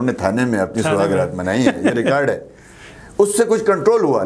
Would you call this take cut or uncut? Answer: uncut